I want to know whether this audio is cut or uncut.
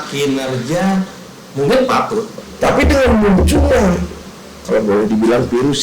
cut